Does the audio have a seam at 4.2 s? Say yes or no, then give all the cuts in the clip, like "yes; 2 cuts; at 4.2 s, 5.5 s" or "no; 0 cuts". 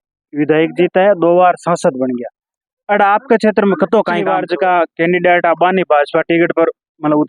yes; 1 cut; at 4.2 s